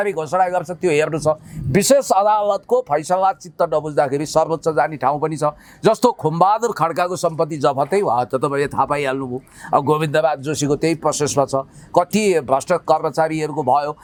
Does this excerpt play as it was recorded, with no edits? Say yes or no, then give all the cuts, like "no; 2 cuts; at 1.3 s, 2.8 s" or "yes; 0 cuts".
yes; 0 cuts